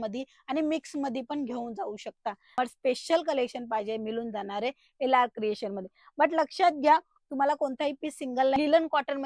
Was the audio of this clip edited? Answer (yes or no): yes